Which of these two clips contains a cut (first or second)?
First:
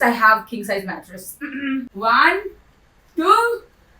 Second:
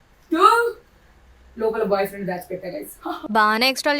first